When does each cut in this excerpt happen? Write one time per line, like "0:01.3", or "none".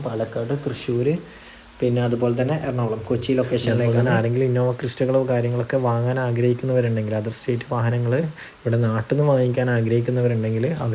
0:03.8